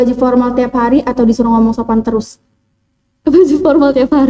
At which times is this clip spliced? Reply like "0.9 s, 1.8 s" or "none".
none

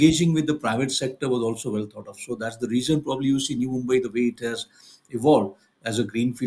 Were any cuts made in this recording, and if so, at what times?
none

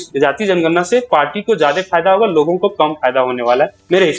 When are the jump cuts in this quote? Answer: none

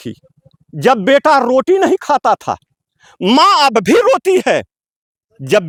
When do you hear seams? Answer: none

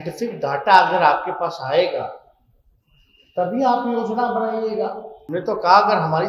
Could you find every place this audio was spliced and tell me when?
5.1 s

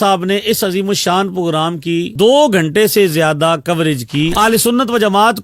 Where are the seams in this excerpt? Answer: 4.3 s

